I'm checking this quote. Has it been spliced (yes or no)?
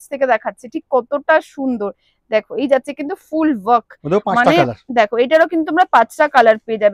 no